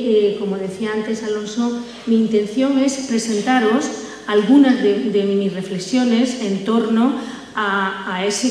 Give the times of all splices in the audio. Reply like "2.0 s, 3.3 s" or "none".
none